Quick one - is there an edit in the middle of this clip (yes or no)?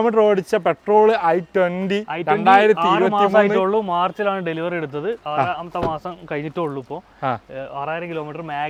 no